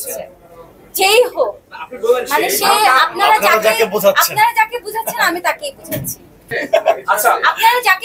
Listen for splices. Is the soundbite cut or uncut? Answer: cut